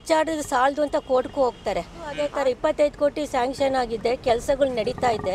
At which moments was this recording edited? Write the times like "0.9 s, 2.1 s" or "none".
2.2 s